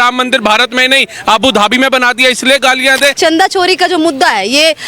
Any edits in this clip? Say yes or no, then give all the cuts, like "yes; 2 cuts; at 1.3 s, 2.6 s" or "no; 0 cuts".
yes; 1 cut; at 3.2 s